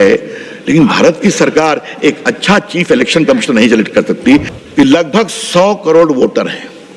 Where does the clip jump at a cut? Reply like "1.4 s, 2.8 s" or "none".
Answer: 4.5 s